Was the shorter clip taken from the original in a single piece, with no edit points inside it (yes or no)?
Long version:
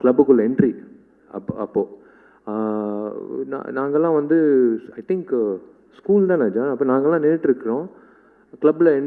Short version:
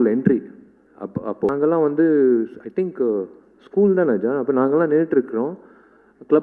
no